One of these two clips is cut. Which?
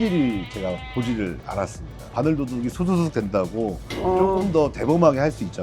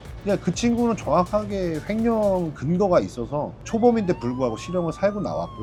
first; 1 cut; at 2.1 s

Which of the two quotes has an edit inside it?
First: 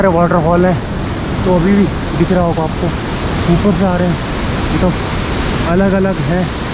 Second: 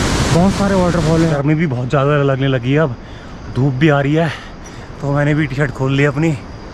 second; 1 cut; at 1.4 s

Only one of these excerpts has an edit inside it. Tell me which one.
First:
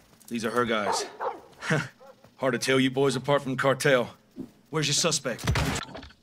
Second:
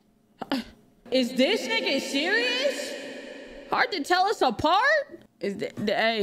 second; 2 cuts; at 0.9 s, 5.2 s

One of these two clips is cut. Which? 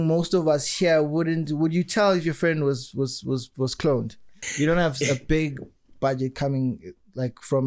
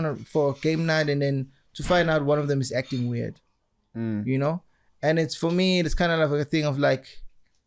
first; 1 cut; at 4.4 s

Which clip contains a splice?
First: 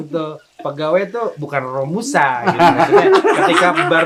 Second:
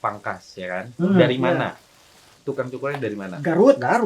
second; 1 cut; at 2.3 s

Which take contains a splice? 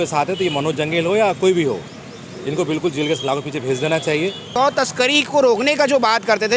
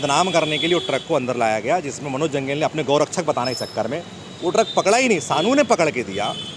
first; 1 cut; at 4.4 s

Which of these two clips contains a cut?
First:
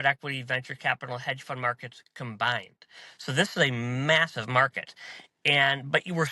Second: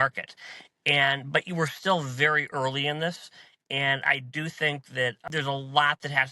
second; 1 cut; at 5.2 s

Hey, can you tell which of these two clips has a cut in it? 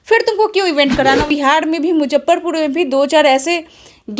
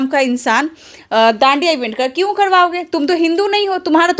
first; 1 cut; at 1.3 s

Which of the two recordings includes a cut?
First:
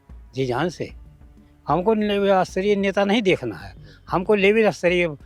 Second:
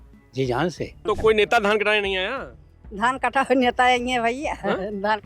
second; 1 cut; at 0.9 s

